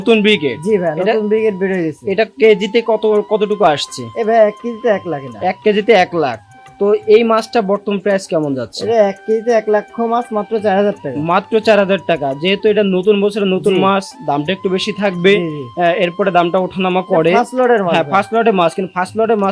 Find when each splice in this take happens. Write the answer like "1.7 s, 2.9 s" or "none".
none